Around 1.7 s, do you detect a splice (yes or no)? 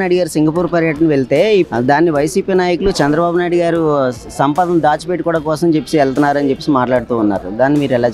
yes